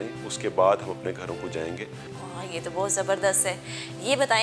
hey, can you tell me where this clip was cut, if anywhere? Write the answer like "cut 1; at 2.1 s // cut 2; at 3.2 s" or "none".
none